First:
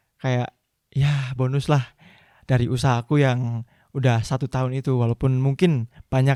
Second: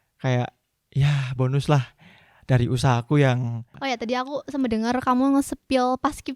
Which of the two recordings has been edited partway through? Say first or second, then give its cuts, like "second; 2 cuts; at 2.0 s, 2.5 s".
second; 1 cut; at 3.7 s